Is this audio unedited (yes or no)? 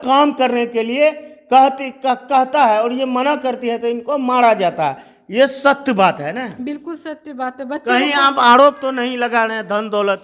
yes